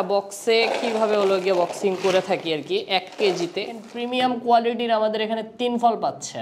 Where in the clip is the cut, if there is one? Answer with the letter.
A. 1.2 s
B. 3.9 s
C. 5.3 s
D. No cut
B